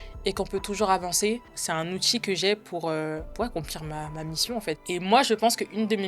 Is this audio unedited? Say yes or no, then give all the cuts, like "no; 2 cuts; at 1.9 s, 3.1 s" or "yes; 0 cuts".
no; 3 cuts; at 1.6 s, 3.3 s, 4.8 s